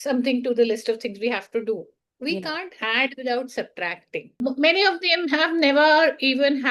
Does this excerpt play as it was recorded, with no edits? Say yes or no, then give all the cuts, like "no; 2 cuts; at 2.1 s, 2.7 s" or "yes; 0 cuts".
no; 1 cut; at 4.4 s